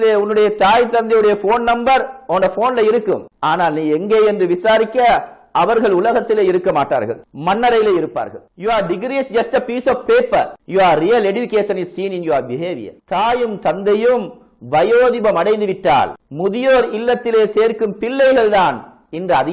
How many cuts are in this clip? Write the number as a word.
two